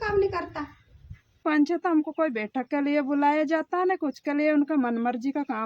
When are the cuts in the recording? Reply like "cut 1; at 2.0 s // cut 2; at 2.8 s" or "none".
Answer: cut 1; at 1.4 s